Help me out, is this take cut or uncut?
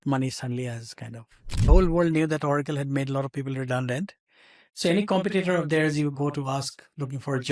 cut